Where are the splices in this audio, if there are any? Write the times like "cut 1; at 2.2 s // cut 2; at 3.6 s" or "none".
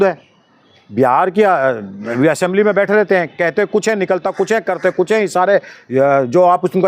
none